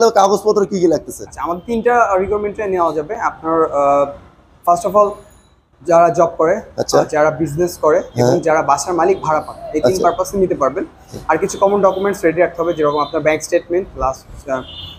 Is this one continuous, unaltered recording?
yes; 0 cuts

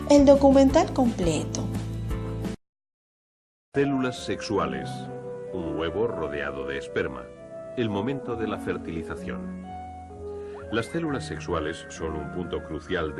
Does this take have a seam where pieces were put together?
yes; 1 cut; at 1.7 s

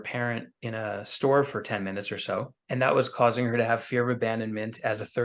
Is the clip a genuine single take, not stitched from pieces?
no; 1 cut; at 2.6 s

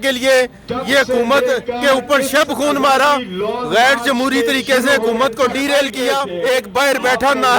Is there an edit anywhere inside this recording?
yes; 1 cut; at 6.3 s

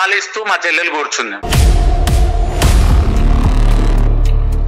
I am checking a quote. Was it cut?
no; 0 cuts

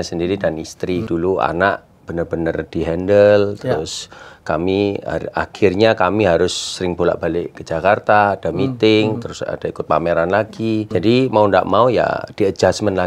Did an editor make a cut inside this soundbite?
yes; 2 cuts; at 1.0 s, 10.9 s

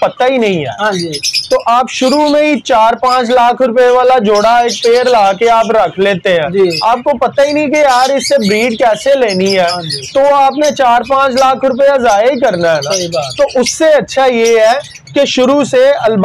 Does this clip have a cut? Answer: no; 0 cuts

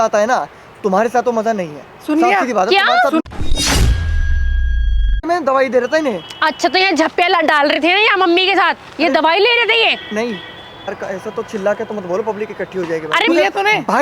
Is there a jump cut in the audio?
yes; 4 cuts; at 3.2 s, 5.2 s, 10.9 s, 13.3 s

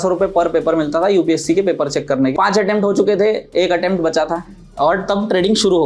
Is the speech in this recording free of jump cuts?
no; 2 cuts; at 2.3 s, 4.6 s

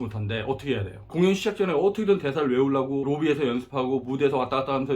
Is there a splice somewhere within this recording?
yes; 2 cuts; at 1.1 s, 3.1 s

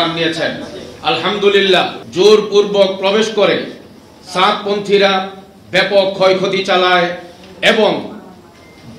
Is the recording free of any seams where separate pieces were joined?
no; 1 cut; at 2.0 s

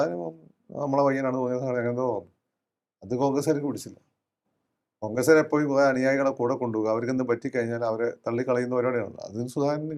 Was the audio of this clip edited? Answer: no; 0 cuts

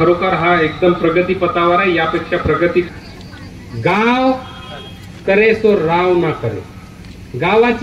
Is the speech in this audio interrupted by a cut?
yes; 1 cut; at 2.9 s

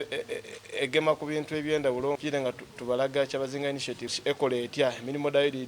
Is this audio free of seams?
no; 2 cuts; at 2.2 s, 4.1 s

